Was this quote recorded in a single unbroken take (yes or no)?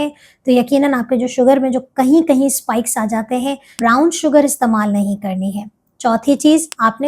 no